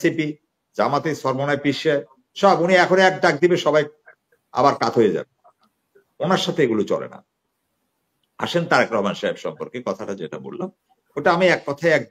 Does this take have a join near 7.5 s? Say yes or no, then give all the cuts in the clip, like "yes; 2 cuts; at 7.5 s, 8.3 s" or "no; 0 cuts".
no; 0 cuts